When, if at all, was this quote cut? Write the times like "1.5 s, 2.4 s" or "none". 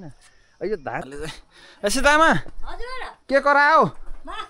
1.0 s